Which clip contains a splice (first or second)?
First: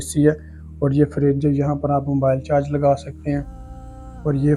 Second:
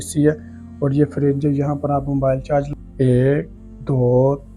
second